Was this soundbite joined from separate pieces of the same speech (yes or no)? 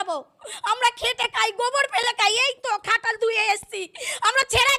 no